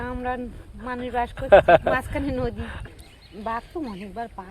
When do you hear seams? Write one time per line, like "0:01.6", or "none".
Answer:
0:02.7